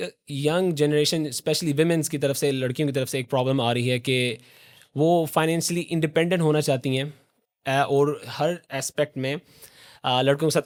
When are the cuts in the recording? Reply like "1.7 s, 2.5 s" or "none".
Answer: none